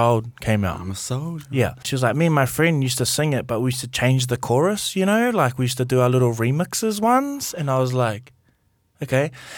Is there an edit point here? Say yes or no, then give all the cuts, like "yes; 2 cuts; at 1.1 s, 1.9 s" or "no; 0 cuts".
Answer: yes; 1 cut; at 1.9 s